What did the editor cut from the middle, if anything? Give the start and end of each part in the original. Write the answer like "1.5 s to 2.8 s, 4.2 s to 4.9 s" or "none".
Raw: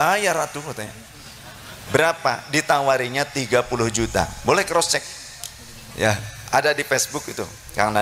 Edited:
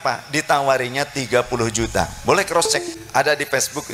5.2 s to 6.3 s